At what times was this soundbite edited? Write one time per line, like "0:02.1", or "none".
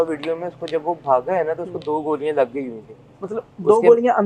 none